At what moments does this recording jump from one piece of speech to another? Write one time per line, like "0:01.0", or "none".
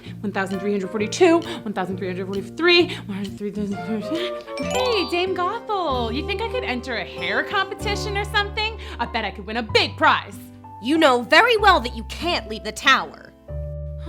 0:04.7